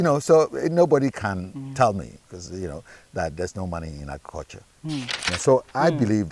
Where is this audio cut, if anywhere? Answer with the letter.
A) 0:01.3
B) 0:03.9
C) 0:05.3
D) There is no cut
C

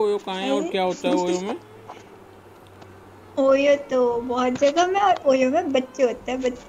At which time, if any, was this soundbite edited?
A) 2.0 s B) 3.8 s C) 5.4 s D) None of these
D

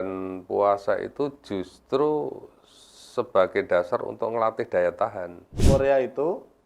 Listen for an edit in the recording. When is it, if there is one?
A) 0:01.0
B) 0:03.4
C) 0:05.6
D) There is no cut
C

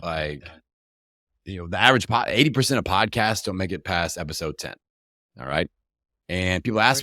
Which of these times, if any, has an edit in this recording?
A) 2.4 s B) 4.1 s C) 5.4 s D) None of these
D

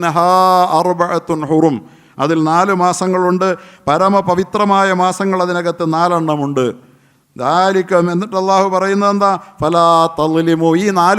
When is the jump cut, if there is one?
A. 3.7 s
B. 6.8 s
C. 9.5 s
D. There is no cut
D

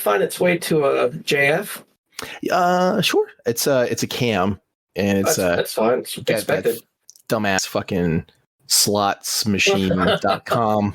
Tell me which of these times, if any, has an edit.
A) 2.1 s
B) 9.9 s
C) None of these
C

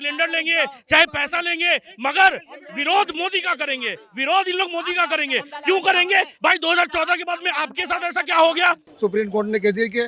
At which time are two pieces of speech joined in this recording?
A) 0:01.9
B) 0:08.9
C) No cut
B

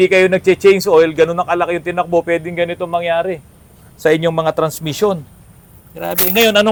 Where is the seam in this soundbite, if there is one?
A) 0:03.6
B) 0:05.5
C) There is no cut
C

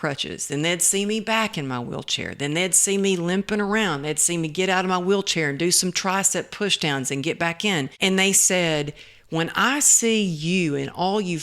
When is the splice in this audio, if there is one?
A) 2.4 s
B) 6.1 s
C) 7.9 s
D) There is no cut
C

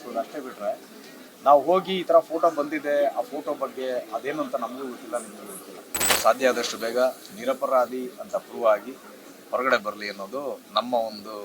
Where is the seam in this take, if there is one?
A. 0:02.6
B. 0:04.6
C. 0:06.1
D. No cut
C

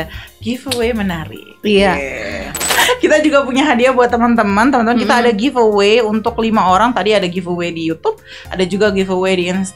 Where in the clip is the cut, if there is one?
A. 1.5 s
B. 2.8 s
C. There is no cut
B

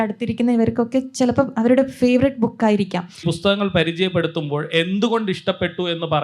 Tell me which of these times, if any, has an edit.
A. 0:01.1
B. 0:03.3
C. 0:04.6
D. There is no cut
B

